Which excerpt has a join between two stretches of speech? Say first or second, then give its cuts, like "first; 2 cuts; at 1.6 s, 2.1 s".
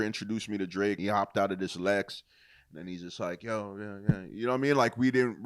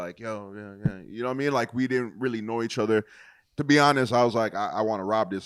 first; 1 cut; at 1.0 s